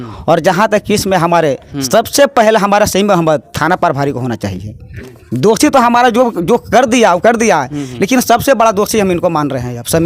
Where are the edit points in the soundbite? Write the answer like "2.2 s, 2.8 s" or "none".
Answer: none